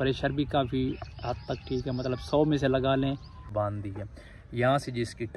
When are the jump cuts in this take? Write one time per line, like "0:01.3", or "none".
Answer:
0:03.4